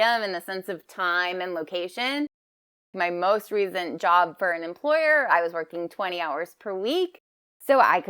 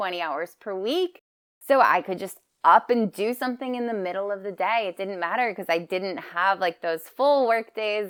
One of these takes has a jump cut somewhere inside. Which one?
first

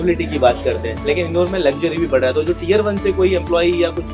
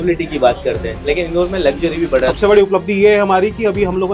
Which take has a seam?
second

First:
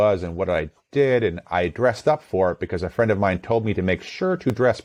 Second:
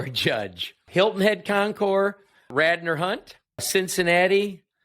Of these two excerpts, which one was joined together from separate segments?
second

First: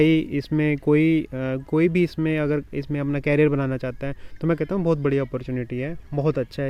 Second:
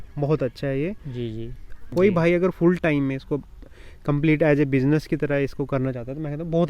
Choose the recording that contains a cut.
second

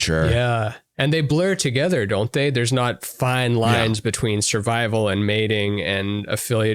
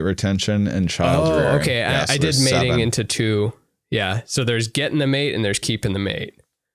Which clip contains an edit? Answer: second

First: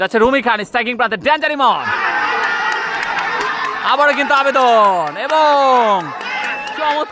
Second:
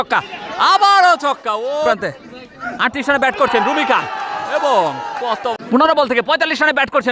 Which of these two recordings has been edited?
second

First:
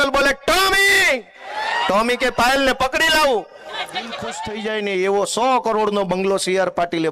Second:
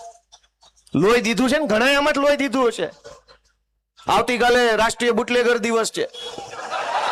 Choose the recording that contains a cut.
first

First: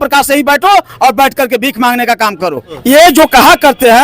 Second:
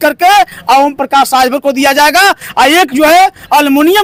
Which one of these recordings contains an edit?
first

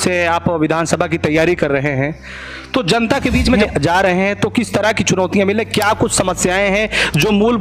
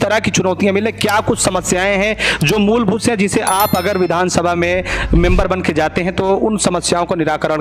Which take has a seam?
first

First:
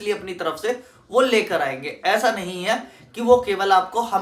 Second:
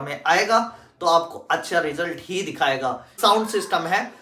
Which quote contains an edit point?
second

